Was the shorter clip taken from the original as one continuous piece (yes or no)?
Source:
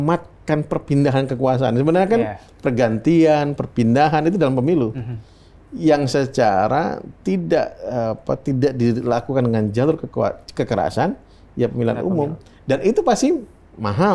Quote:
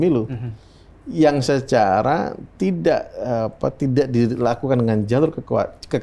yes